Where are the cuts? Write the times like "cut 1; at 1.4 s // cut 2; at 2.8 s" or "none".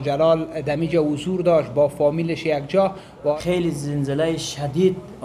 cut 1; at 3.3 s